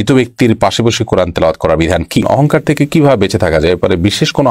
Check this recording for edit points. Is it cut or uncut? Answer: cut